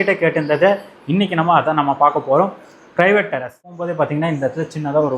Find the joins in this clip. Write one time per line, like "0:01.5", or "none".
0:03.7